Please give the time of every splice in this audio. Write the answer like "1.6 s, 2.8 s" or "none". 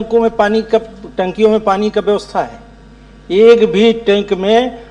none